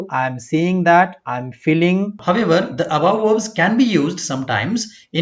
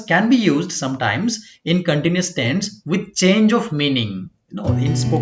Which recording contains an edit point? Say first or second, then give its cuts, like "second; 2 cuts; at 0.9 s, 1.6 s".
first; 1 cut; at 2.2 s